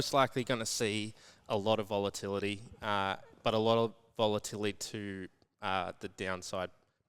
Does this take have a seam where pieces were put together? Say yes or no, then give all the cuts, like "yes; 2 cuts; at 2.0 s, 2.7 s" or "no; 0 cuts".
no; 0 cuts